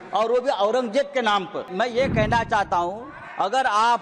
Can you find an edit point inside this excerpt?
yes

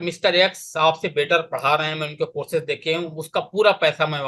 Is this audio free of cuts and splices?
yes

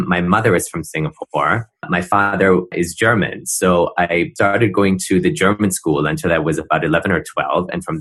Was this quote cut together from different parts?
yes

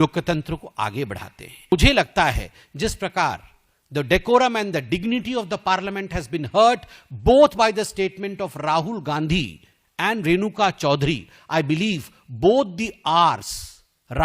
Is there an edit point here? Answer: yes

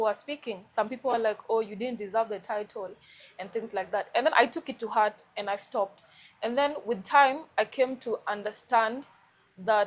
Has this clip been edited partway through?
no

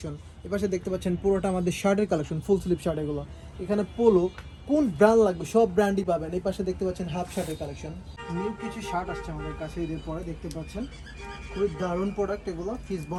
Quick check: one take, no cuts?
yes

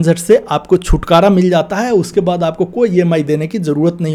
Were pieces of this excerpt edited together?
no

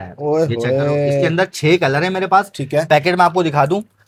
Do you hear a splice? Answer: no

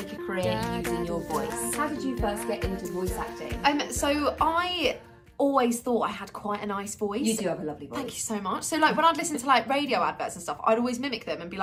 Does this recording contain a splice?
no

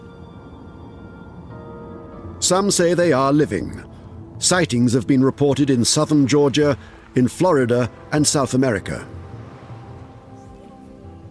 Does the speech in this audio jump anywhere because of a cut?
yes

